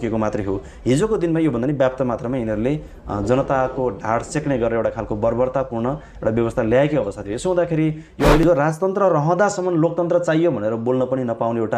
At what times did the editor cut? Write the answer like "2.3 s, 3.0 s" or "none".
8.4 s